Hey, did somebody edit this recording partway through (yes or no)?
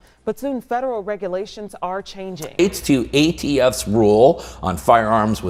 no